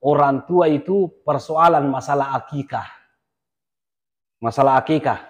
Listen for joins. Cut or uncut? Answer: uncut